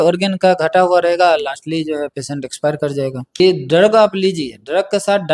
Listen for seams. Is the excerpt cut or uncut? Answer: cut